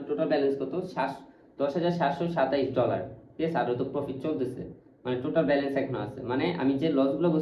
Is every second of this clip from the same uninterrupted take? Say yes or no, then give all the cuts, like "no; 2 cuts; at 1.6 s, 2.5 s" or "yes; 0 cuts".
yes; 0 cuts